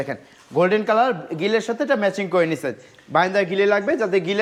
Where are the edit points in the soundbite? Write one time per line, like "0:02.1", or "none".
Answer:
none

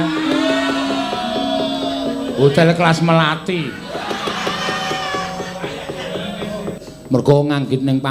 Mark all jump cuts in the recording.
0:06.8

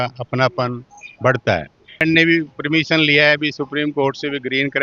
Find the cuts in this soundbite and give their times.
0:02.0

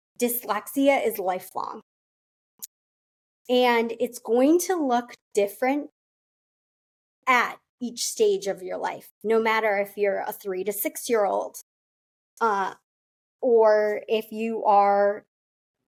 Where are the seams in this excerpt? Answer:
none

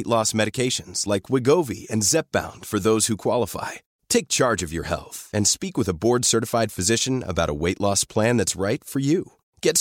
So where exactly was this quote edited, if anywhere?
none

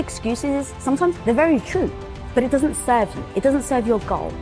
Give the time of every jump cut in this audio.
0:02.2

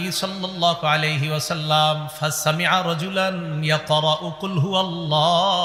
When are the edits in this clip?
none

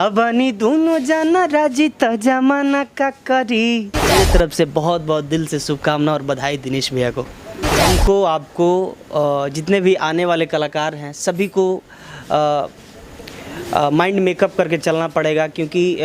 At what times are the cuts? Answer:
0:04.1
0:07.8

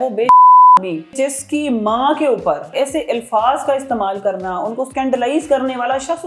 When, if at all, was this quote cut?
0:01.1
0:02.7
0:04.9

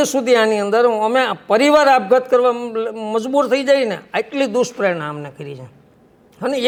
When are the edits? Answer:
none

